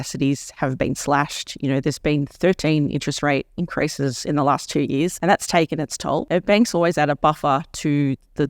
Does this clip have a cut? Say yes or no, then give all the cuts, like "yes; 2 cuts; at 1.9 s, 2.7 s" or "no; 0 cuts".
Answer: yes; 2 cuts; at 5.2 s, 6.2 s